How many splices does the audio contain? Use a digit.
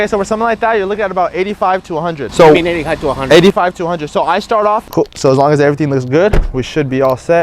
2